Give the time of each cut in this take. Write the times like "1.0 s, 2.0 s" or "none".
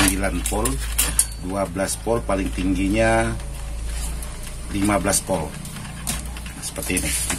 none